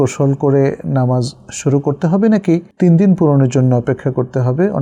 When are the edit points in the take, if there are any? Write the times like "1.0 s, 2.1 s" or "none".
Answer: none